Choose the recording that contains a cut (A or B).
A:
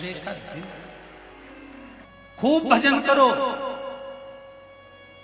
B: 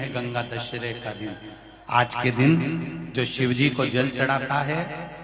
A